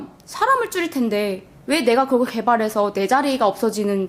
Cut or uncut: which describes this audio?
uncut